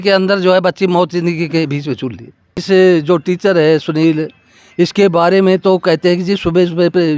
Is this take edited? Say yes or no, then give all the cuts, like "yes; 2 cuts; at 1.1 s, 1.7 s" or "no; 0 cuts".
yes; 1 cut; at 2.6 s